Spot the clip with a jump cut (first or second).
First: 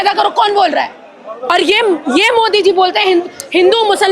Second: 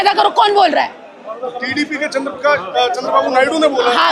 first